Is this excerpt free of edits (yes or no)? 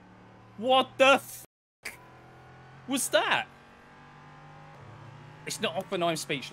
no